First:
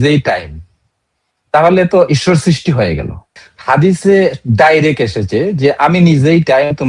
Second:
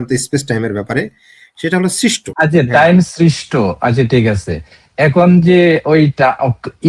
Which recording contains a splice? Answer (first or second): second